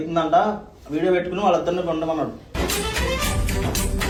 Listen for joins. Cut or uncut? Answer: uncut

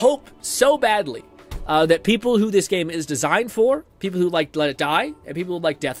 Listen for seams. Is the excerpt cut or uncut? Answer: uncut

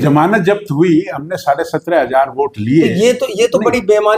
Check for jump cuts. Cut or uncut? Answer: uncut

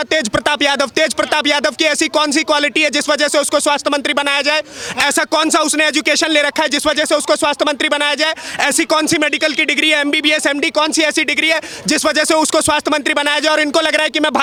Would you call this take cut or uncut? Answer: uncut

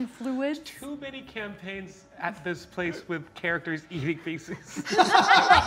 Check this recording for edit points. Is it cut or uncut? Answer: uncut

